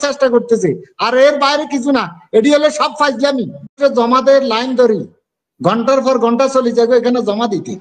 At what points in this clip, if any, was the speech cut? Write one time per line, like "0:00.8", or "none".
0:03.8